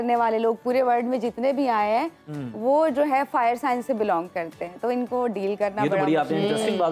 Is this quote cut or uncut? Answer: uncut